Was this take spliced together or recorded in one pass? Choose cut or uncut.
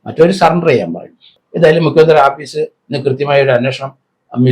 cut